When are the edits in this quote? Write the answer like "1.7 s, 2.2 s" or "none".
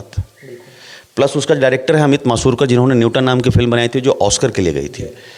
none

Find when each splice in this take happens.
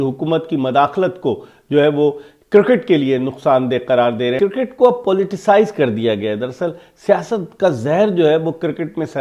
4.4 s

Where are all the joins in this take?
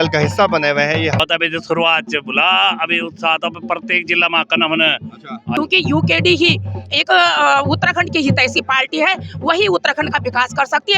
1.2 s, 5.5 s

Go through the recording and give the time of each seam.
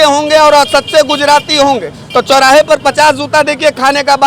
none

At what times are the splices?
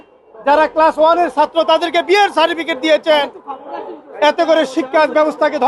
none

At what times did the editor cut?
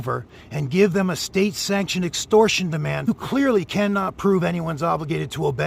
3.1 s

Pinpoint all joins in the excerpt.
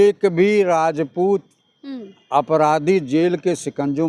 none

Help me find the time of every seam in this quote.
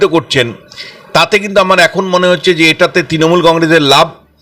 none

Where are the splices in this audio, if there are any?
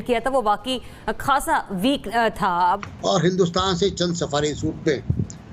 2.8 s

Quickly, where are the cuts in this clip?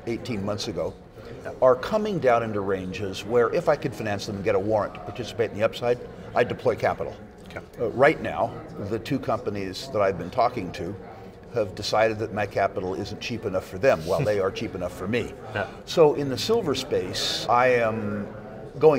17.4 s

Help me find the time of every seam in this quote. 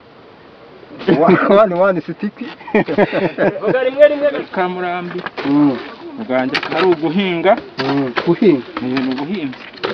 4.4 s

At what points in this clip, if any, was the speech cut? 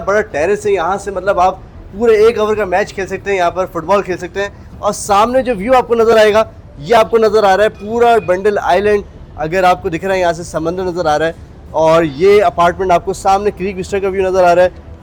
none

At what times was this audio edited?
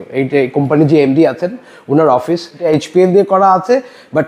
2.6 s

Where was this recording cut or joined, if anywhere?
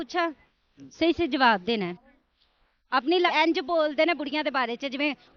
3.3 s

